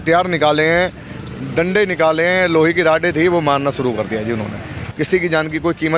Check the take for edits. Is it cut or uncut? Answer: cut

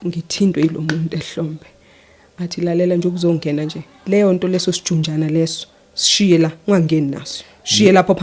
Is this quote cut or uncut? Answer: uncut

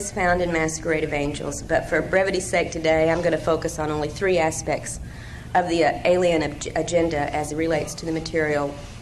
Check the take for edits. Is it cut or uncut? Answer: cut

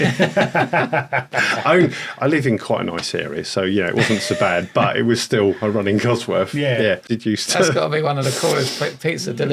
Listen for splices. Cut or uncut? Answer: cut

